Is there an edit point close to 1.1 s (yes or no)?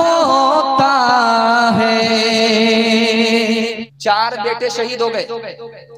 no